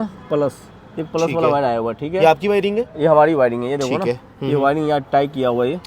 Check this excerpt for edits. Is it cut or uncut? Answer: uncut